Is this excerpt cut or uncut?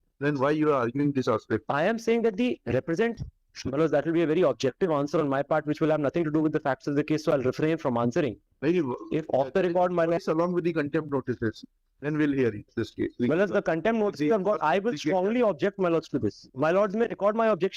cut